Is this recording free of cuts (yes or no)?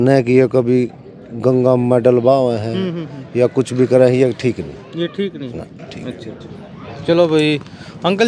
yes